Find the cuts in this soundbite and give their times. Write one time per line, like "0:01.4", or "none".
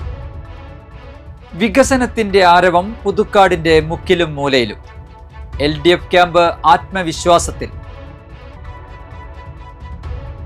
none